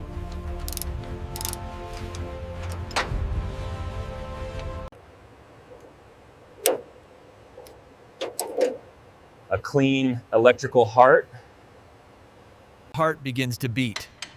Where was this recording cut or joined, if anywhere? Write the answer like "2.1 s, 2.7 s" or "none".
none